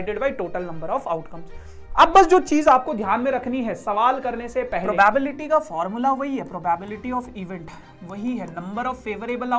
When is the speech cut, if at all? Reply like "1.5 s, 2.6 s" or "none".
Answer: 4.8 s